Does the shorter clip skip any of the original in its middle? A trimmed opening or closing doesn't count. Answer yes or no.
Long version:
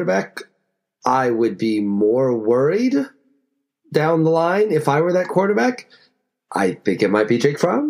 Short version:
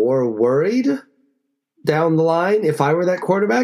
no